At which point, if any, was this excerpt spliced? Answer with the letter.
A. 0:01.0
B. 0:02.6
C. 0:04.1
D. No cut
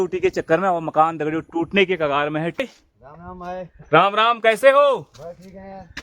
B